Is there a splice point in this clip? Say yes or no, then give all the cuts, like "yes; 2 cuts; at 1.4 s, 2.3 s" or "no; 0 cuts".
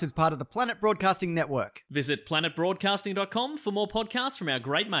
no; 0 cuts